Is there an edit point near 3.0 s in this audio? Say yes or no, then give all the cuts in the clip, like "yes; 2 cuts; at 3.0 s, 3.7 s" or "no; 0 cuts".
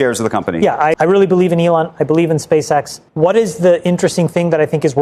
yes; 2 cuts; at 0.9 s, 3.0 s